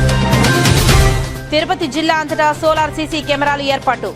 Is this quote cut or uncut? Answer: cut